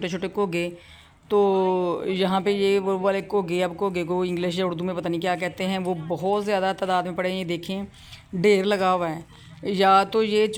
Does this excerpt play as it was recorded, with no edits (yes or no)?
yes